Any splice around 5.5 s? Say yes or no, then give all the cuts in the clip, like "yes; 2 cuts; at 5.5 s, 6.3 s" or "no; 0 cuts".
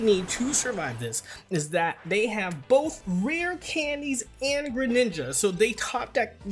no; 1 cut; at 3.0 s